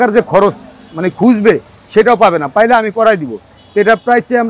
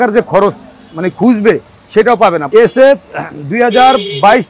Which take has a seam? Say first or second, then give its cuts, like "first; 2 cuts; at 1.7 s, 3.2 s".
second; 1 cut; at 2.4 s